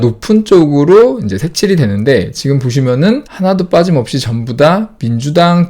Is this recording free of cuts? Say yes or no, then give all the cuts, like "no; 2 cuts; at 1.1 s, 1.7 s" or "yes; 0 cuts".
no; 1 cut; at 3.3 s